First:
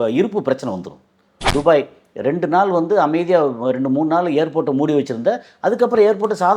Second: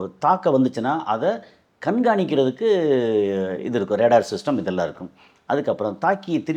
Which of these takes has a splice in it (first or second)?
first